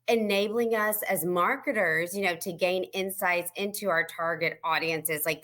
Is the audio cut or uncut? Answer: uncut